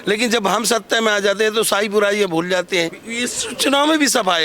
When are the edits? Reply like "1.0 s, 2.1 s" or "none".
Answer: 3.0 s